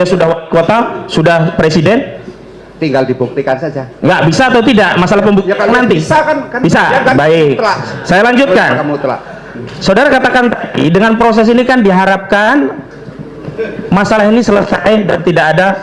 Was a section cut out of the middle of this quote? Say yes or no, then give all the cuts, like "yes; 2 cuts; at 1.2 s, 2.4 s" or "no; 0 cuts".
no; 0 cuts